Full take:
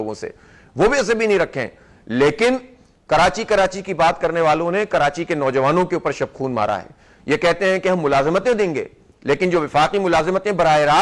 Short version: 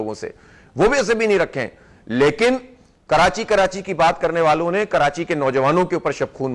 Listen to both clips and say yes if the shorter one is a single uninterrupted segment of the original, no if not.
yes